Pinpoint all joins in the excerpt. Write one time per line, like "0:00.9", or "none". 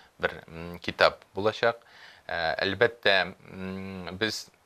none